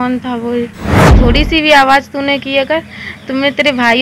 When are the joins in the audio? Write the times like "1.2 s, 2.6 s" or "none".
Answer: 1.1 s